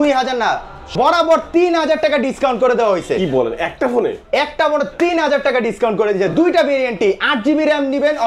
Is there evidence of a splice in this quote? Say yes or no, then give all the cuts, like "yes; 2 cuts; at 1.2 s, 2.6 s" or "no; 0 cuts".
yes; 1 cut; at 0.9 s